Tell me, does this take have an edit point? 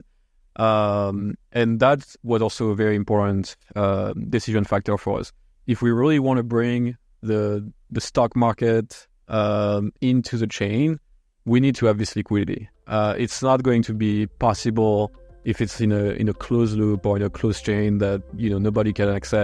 no; 0 cuts

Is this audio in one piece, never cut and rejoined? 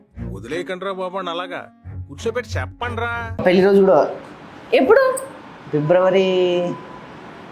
no; 1 cut; at 3.4 s

